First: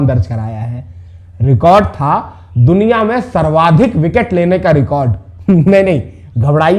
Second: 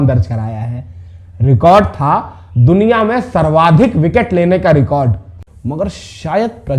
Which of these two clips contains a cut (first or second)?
second